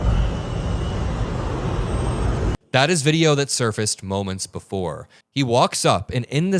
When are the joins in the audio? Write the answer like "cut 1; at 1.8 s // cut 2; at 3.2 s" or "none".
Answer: cut 1; at 5.1 s